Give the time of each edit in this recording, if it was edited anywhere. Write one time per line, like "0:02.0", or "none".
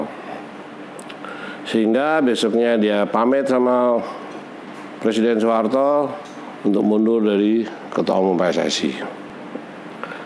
0:09.3